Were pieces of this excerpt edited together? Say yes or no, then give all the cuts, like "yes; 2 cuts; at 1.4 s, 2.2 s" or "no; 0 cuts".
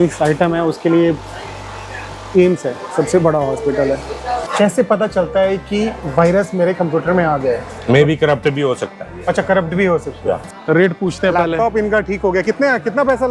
yes; 3 cuts; at 4.4 s, 7.7 s, 10.5 s